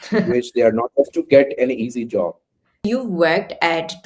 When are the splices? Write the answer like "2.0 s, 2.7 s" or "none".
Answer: 2.8 s